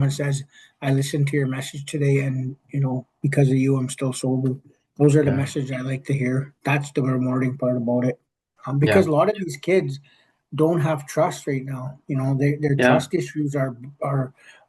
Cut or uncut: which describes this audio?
cut